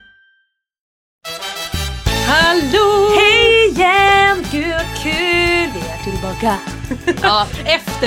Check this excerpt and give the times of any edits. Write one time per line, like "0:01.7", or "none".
0:01.2